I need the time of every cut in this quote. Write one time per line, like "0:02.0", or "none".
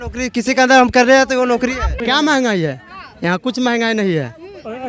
0:02.0